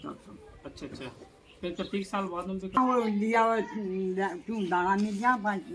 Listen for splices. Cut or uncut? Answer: cut